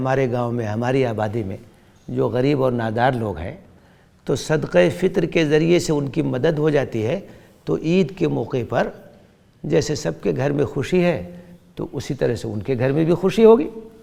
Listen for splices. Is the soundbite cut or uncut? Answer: uncut